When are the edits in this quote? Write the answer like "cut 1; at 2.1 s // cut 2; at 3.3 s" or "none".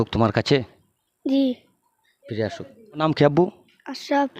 cut 1; at 3.0 s